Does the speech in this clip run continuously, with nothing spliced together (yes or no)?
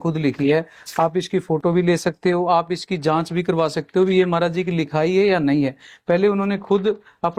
yes